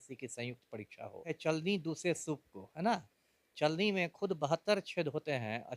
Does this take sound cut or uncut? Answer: cut